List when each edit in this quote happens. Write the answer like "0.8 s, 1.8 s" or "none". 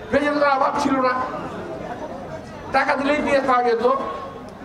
none